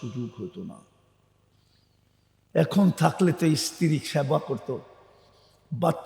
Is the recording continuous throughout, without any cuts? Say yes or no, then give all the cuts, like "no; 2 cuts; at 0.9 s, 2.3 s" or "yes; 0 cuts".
no; 1 cut; at 1.7 s